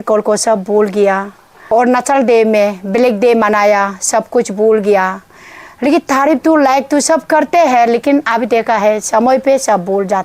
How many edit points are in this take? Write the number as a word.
one